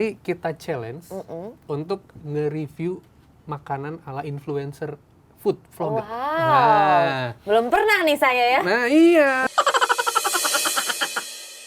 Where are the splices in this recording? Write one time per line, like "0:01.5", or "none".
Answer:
none